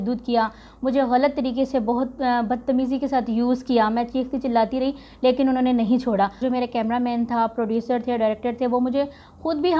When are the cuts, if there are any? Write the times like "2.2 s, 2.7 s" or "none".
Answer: 6.4 s